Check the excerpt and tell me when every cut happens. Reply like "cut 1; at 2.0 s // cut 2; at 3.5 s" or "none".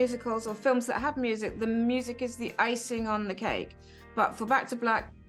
none